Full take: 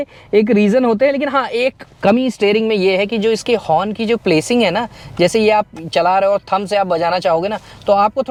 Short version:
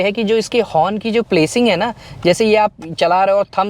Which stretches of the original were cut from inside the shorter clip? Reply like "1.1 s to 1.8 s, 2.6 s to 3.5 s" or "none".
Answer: none